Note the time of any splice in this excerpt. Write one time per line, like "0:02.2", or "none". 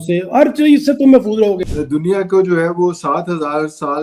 0:01.7